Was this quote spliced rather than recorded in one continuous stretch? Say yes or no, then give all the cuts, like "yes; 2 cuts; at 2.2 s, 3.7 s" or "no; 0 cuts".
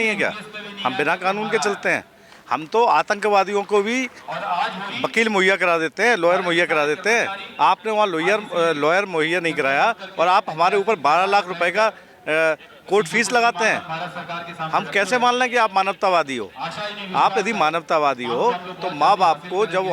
no; 0 cuts